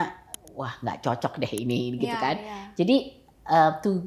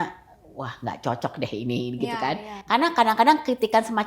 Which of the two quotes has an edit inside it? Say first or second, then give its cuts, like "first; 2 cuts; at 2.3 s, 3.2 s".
second; 1 cut; at 2.5 s